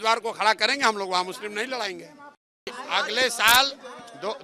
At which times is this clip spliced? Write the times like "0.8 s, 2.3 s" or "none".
2.7 s